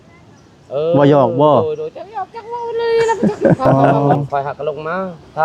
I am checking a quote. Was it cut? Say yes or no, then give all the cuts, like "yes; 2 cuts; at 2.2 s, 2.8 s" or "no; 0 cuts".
yes; 1 cut; at 3.8 s